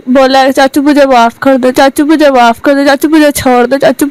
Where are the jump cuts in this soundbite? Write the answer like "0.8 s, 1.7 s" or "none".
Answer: none

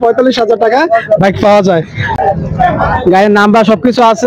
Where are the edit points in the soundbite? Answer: 2.1 s

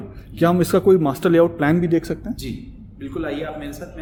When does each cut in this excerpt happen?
none

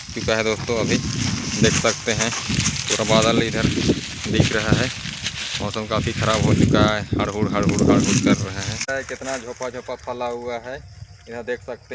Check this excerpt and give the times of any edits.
8.9 s

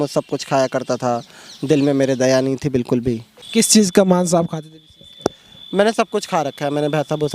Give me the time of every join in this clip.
3.3 s

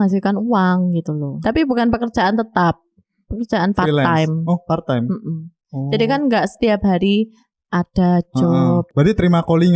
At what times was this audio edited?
1.4 s, 8.9 s

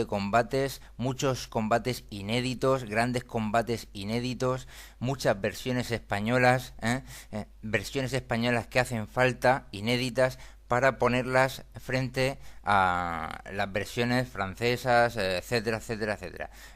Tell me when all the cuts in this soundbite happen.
8.8 s

